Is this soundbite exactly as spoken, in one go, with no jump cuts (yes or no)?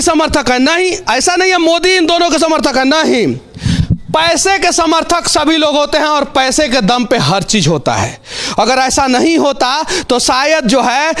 yes